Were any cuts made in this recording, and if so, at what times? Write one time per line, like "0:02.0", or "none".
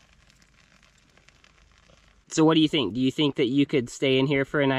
0:02.2

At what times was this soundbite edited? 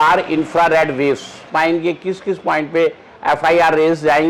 0:01.5

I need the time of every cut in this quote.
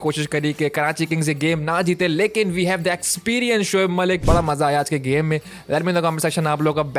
0:04.2

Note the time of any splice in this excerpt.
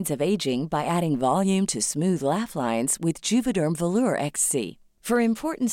none

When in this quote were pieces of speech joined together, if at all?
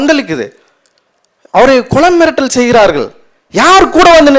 none

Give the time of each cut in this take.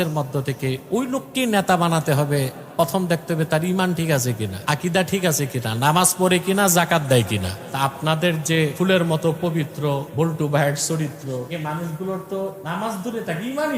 0:04.5
0:07.6
0:08.7
0:10.1
0:11.5
0:12.6

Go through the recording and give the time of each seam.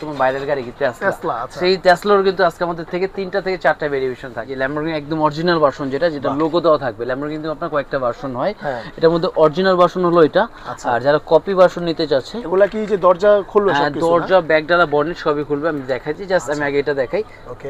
0:04.5

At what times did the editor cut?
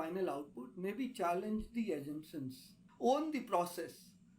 0:02.9

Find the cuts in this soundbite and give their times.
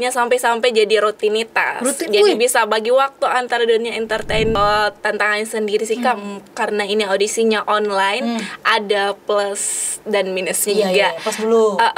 0:04.6

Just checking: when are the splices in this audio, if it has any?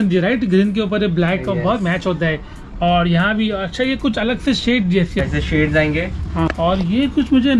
0:05.2
0:06.5

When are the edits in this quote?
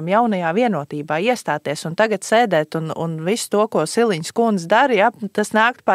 none

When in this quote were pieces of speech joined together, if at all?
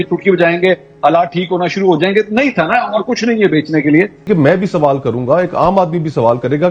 0:04.2

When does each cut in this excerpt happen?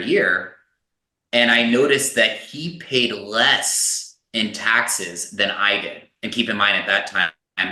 none

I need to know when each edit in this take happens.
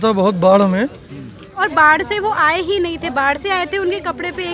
0:01.6

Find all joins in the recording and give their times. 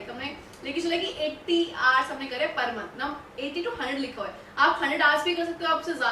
none

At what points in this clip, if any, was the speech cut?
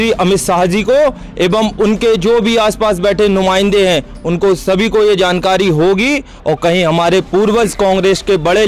0:06.3

